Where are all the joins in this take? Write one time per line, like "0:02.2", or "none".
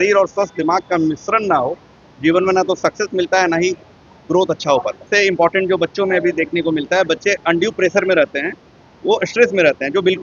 0:05.1